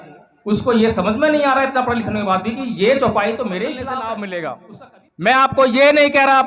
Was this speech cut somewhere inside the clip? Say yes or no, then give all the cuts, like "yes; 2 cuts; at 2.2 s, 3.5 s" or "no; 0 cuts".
yes; 1 cut; at 3.8 s